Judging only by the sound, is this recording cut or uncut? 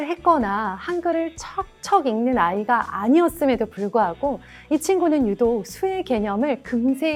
uncut